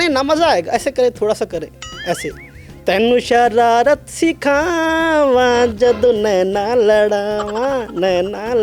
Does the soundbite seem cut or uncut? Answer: uncut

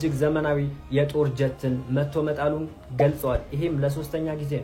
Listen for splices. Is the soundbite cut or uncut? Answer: uncut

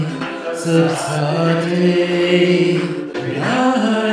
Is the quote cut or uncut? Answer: uncut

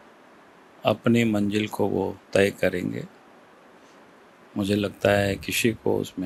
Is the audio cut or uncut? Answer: uncut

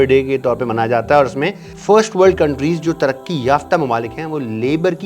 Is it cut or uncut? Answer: cut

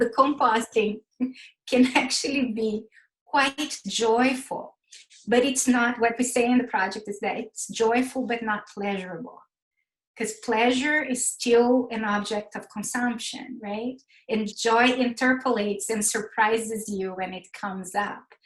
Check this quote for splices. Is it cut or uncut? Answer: cut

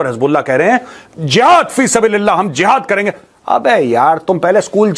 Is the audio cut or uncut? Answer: uncut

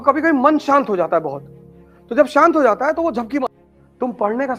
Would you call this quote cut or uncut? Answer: cut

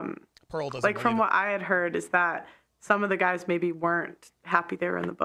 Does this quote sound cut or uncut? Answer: uncut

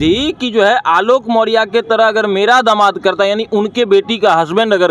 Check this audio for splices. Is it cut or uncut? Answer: uncut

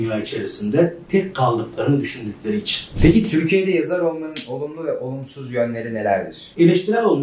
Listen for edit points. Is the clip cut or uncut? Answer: cut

